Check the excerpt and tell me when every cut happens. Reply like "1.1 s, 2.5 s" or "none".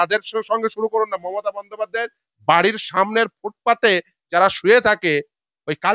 none